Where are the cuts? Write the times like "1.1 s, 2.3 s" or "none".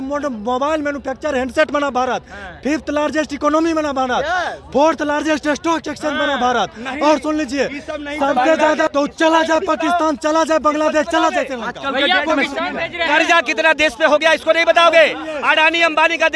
8.9 s